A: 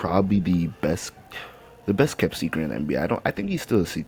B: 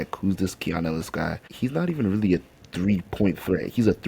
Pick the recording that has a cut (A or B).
B